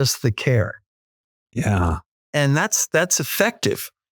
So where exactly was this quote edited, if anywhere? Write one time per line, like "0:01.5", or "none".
none